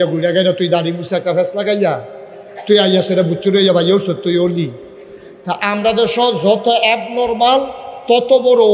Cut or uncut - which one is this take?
uncut